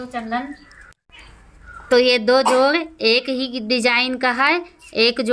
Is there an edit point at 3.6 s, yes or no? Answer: no